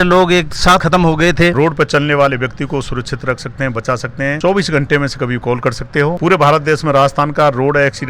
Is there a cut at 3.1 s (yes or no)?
no